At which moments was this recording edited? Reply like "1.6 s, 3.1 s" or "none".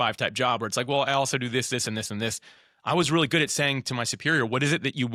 none

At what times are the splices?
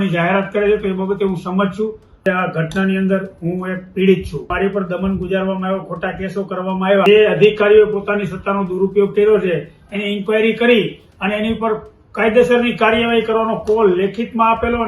2.2 s, 4.5 s, 7.1 s

